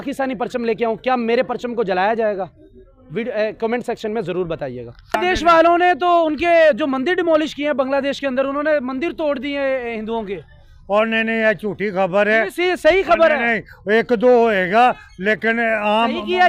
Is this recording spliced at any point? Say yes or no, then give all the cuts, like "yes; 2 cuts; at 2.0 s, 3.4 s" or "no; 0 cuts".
no; 0 cuts